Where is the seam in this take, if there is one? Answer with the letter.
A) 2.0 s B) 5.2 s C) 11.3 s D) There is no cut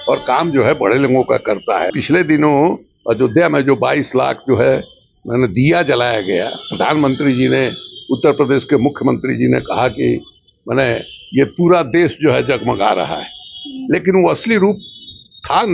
A